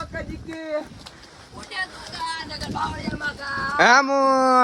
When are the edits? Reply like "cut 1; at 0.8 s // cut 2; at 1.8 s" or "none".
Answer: none